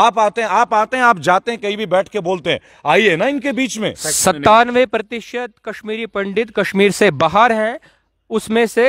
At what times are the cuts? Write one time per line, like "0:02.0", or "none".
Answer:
0:04.1